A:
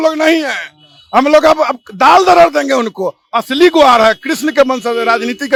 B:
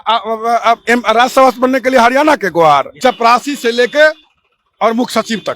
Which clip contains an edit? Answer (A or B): B